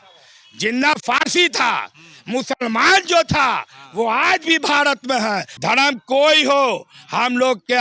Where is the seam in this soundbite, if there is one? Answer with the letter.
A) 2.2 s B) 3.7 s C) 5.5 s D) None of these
C